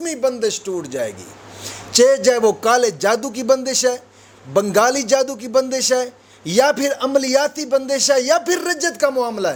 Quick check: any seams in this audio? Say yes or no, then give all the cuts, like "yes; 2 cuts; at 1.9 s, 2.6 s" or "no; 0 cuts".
no; 0 cuts